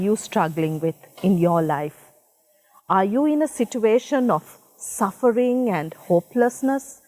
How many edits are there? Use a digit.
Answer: 0